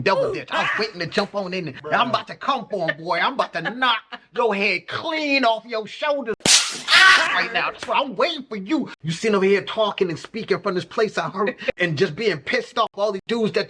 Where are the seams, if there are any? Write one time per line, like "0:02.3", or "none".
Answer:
0:06.4
0:09.0